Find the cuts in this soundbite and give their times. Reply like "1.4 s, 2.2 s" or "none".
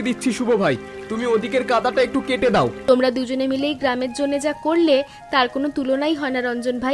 2.8 s

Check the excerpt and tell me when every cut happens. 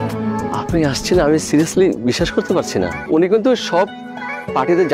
3.0 s

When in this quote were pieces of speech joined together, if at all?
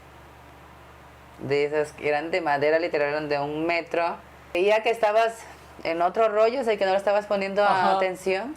4.6 s

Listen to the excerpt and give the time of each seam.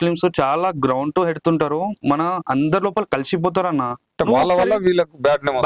4.0 s

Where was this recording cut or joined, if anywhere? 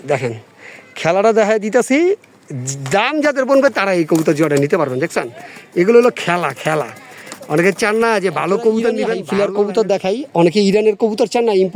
9.1 s

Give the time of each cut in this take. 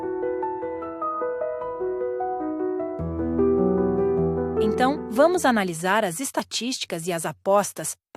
4.7 s

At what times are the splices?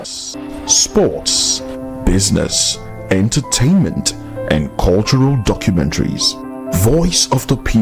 none

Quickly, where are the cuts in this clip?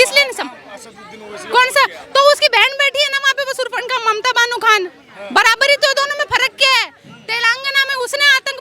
none

